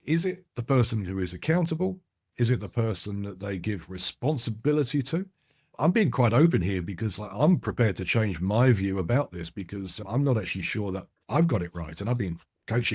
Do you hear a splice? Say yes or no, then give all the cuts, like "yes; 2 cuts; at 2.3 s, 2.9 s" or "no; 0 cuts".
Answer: yes; 2 cuts; at 5.7 s, 10.0 s